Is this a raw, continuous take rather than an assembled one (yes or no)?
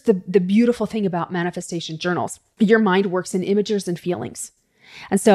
no